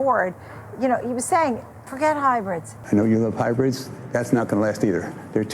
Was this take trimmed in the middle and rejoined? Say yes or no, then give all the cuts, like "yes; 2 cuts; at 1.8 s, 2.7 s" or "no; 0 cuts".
yes; 1 cut; at 2.7 s